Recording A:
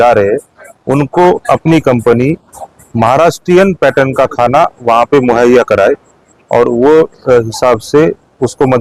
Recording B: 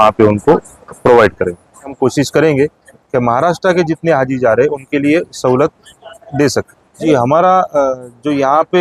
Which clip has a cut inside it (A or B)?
B